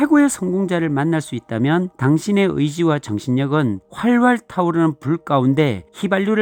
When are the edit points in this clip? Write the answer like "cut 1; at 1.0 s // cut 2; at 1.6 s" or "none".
none